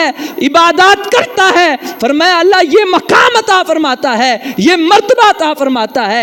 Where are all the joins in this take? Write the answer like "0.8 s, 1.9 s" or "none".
none